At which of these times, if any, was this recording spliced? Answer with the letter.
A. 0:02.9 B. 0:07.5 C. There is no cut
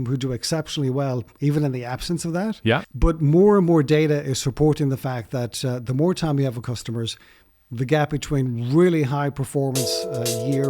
A